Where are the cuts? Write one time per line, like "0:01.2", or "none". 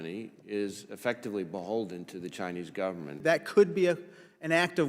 0:03.2

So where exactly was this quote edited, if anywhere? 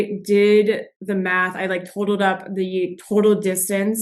0:00.9

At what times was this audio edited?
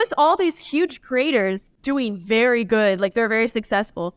0:01.7

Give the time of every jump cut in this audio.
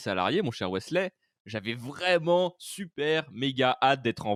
none

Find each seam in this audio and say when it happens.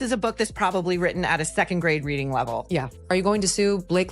0:02.9

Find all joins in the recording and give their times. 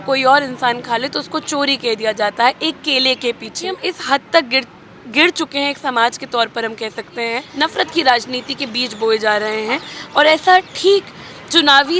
0:03.8
0:07.5

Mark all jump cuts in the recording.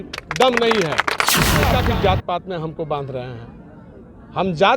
0:01.7

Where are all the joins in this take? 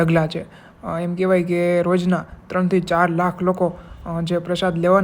none

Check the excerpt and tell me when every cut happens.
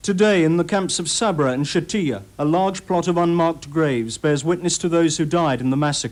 none

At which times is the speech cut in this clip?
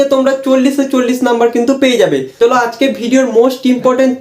0:02.3

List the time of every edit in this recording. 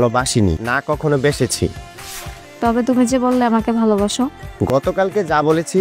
none

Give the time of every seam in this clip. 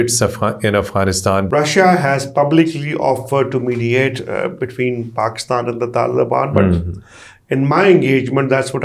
0:01.5

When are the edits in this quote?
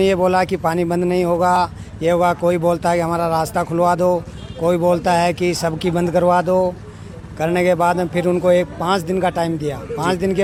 none

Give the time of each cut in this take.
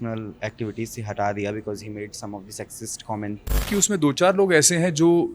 0:03.6

